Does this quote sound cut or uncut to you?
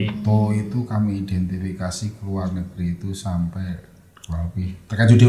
uncut